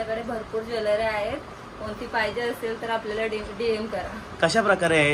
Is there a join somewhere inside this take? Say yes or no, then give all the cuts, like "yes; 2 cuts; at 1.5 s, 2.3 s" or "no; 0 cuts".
no; 0 cuts